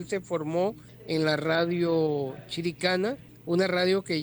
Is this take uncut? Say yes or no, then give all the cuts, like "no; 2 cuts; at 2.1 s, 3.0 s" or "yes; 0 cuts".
no; 2 cuts; at 0.9 s, 3.3 s